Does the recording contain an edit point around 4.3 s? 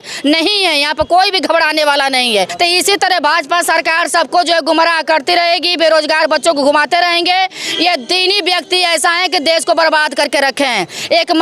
no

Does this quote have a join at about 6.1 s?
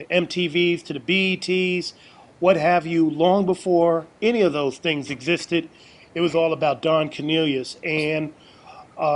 no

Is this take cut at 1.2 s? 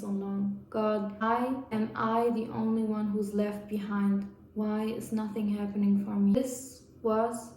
yes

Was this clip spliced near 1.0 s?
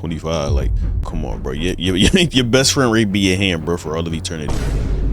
yes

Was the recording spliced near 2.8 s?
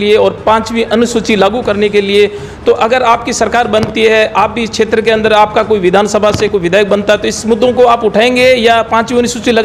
no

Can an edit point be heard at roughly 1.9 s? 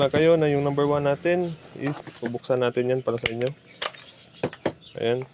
yes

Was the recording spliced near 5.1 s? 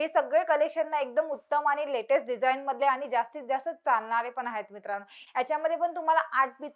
yes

